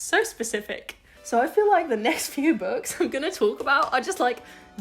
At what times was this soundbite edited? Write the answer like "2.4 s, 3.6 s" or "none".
1.1 s